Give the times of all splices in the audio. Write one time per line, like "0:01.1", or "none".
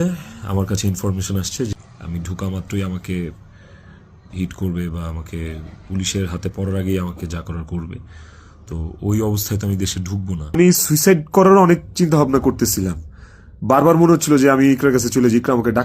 0:01.7
0:10.4

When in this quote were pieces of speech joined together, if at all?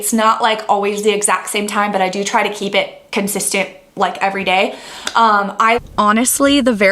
0:05.8

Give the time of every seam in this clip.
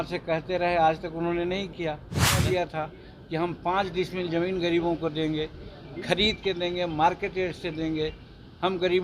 0:02.4

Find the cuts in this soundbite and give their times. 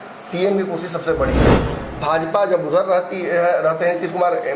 0:01.7

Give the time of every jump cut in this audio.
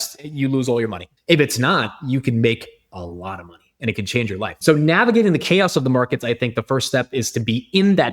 0:01.1
0:04.6

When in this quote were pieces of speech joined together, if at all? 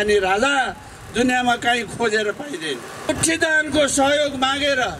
0:03.1

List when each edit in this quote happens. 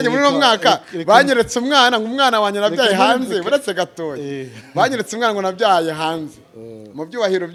none

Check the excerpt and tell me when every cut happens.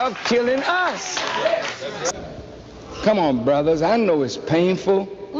0:02.1

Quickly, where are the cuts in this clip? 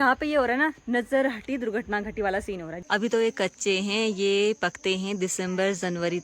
0:02.7

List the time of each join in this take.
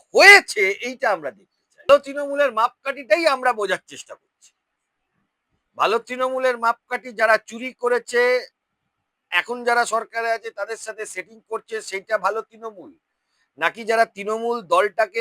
0:01.9

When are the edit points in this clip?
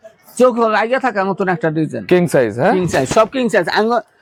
none

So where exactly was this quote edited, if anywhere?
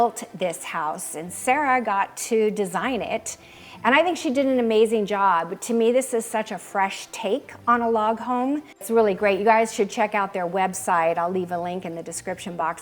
0:08.8

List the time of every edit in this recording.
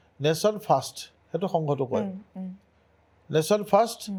none

